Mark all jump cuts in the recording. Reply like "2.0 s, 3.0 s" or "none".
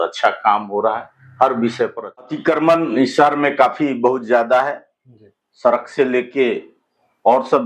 2.3 s